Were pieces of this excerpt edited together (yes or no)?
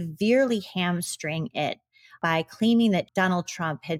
yes